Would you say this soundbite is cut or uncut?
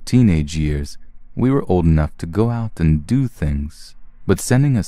uncut